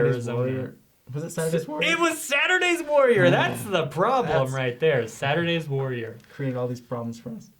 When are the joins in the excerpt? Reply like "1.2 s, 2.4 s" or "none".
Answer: 6.2 s